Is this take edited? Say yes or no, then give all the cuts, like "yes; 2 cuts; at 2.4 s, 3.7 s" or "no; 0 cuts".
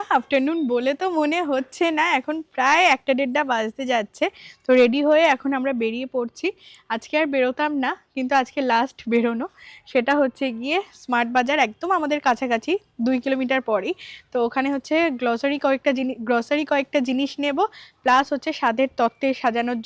no; 0 cuts